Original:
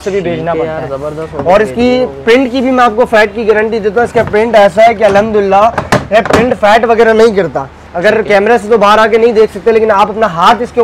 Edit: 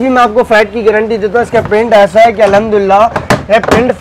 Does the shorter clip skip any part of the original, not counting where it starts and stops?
no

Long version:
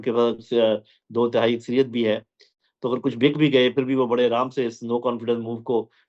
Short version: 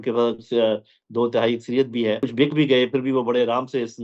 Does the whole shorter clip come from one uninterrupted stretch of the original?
no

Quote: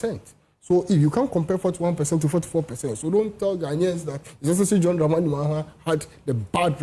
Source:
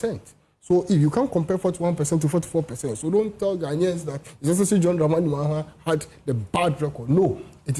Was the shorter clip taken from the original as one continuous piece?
yes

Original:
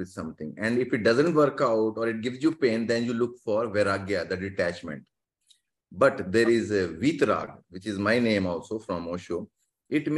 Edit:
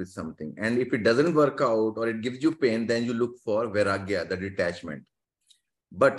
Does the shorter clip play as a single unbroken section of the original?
yes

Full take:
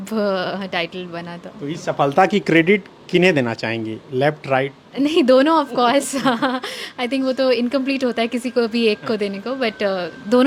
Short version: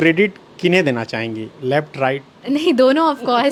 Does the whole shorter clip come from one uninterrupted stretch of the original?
yes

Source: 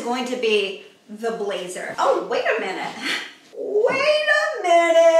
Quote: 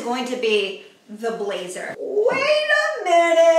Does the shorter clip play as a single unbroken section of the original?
no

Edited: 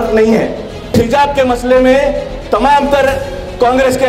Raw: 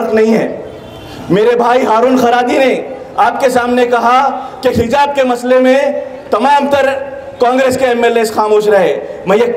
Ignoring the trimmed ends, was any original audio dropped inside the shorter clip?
yes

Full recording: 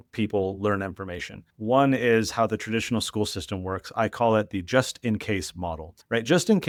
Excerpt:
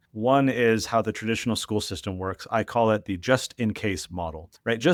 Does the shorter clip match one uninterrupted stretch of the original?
yes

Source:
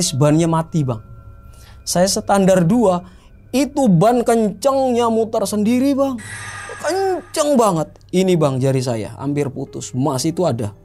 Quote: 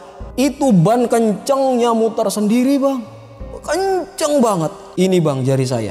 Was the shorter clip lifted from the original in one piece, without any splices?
yes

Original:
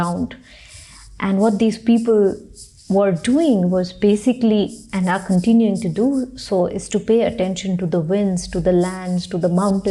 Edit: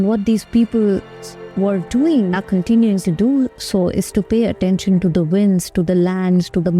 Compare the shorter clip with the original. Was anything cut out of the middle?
yes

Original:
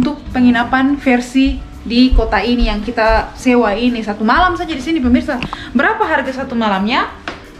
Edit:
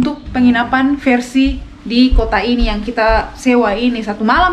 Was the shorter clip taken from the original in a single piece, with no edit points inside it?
yes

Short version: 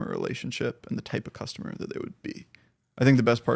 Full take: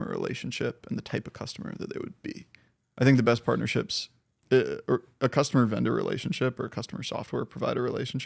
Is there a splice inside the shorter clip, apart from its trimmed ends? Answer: no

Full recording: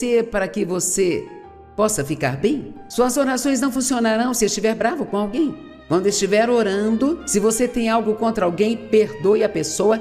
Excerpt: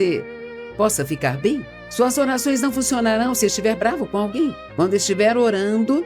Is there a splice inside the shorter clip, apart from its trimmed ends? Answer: yes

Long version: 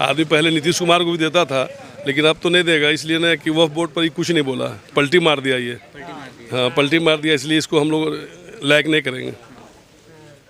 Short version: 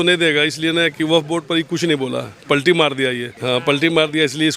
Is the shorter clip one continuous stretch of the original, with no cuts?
no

